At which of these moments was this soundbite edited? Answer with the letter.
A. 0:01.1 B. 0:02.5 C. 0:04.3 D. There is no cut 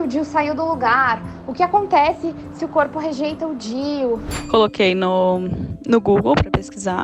C